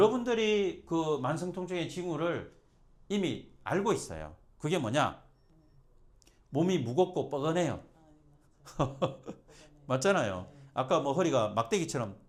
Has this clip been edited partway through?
no; 0 cuts

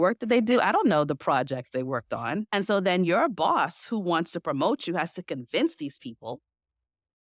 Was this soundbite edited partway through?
yes; 1 cut; at 2.5 s

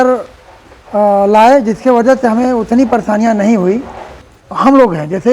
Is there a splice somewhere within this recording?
yes; 1 cut; at 4.1 s

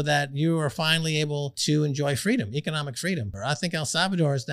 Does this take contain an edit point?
yes; 2 cuts; at 1.6 s, 3.4 s

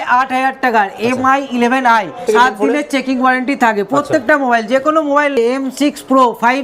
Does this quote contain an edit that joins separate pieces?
yes; 2 cuts; at 2.2 s, 5.3 s

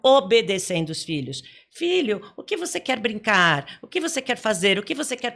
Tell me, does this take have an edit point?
no; 0 cuts

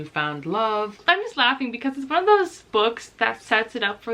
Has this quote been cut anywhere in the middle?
yes; 1 cut; at 1.0 s

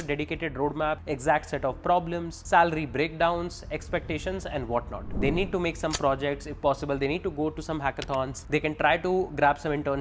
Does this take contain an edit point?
yes; 4 cuts; at 1.0 s, 2.3 s, 5.0 s, 8.4 s

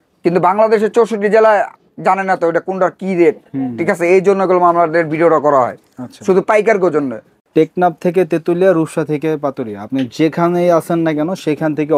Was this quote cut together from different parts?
no; 0 cuts

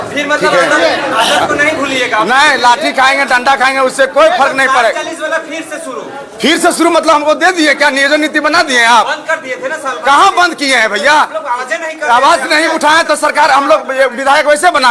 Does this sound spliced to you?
no; 0 cuts

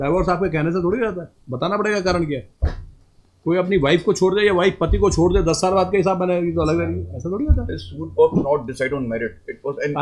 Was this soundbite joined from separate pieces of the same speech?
no; 0 cuts

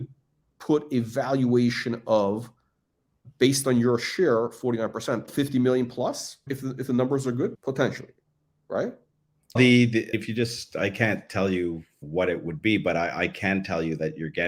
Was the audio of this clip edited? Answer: no; 0 cuts

